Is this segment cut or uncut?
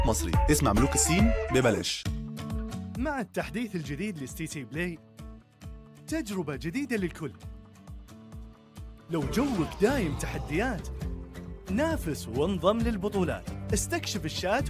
cut